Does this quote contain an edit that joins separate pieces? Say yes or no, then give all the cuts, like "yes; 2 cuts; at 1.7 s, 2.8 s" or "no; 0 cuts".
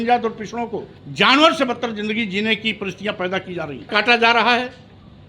yes; 2 cuts; at 1.0 s, 3.9 s